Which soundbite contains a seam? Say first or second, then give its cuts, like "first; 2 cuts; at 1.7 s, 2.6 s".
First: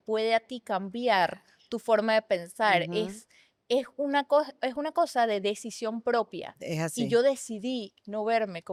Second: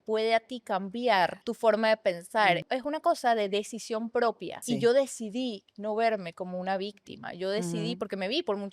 second; 3 cuts; at 1.4 s, 2.6 s, 4.6 s